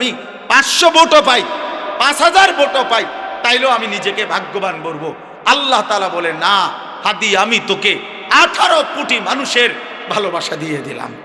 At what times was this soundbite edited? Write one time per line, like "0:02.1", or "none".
none